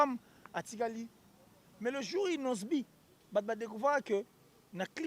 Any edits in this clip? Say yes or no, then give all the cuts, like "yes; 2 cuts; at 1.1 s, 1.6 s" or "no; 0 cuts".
yes; 1 cut; at 1.6 s